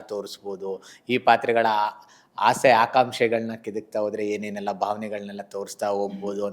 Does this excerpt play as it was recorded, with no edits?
yes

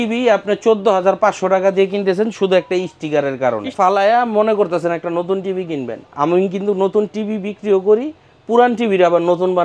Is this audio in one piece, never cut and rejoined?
no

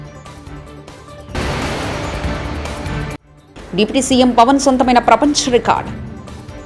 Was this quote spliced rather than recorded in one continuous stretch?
yes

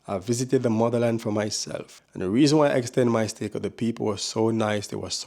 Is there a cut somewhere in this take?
yes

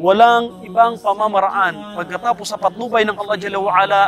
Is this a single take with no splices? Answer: yes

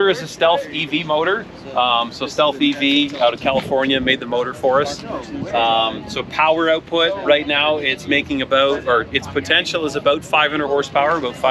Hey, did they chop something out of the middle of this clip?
no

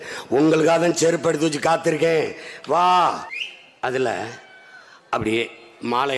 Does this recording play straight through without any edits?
no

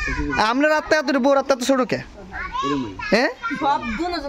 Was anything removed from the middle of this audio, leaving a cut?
no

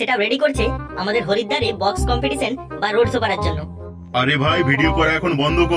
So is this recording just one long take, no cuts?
yes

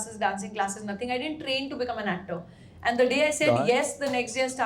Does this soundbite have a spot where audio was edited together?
no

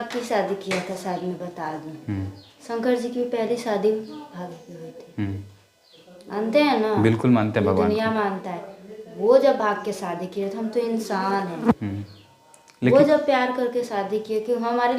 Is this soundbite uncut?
yes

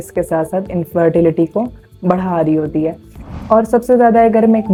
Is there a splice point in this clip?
no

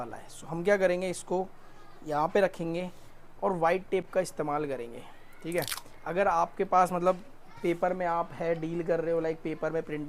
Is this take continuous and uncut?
yes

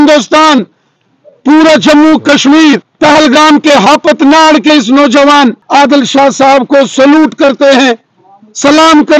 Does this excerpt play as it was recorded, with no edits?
no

